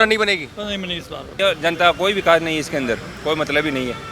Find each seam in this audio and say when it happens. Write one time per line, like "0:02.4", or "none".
0:01.3